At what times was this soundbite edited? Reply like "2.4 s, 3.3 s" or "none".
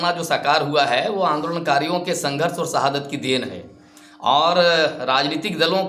none